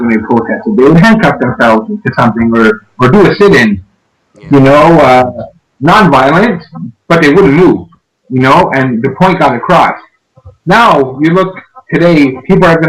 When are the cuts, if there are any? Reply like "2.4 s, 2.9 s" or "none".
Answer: 1.4 s